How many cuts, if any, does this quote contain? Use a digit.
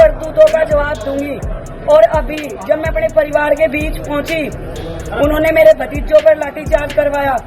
0